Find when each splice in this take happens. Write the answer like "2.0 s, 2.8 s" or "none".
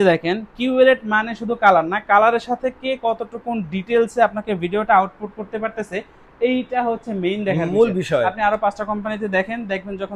none